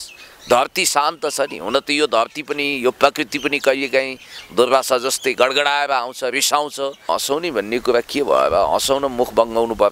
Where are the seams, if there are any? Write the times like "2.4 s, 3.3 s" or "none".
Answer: 7.1 s